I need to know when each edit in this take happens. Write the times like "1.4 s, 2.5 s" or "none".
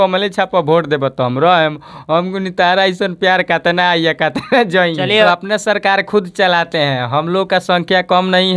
5.1 s